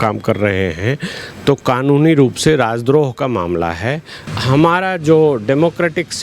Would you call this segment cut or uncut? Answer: cut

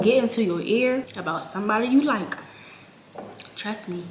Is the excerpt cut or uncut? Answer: uncut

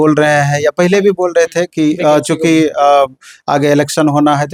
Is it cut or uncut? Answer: uncut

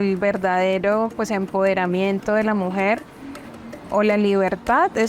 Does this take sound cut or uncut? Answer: uncut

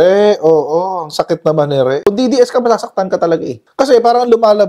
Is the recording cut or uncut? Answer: uncut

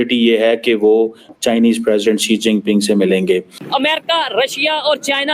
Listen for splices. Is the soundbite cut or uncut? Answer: cut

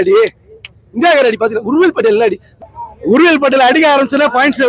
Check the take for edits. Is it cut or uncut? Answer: cut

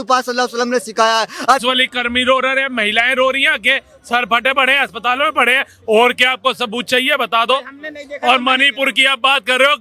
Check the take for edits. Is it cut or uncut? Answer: cut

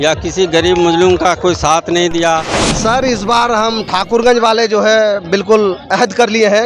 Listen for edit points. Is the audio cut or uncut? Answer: cut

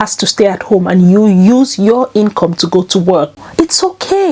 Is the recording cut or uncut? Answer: cut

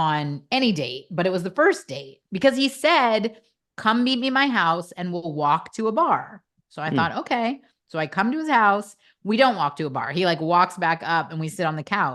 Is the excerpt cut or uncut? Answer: uncut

